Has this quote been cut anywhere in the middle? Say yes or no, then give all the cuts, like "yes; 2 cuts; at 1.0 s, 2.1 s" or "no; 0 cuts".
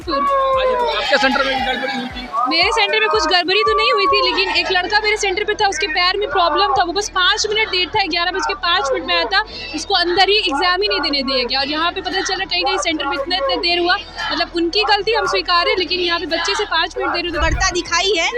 yes; 1 cut; at 17.4 s